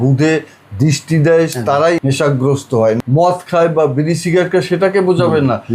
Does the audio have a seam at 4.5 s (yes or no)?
no